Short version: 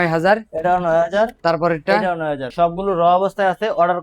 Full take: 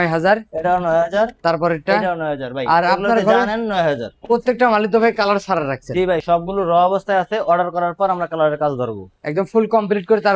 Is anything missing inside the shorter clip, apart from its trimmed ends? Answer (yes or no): yes